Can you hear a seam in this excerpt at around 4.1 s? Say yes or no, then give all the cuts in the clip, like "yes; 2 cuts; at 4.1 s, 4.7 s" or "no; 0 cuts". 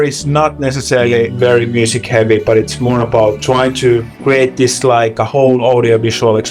no; 0 cuts